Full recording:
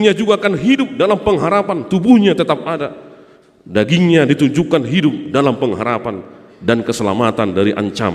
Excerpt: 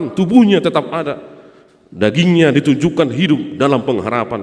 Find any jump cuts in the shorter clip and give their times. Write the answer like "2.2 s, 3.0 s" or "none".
none